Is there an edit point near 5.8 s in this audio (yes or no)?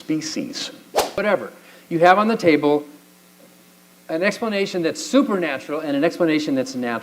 no